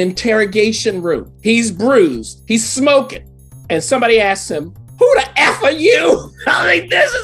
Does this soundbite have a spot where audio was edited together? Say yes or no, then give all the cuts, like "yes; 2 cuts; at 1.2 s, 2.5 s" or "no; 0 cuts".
yes; 1 cut; at 1.3 s